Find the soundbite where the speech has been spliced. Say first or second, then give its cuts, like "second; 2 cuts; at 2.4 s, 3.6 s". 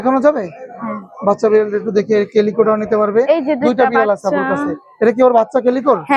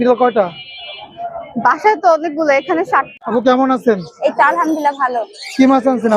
second; 1 cut; at 3.1 s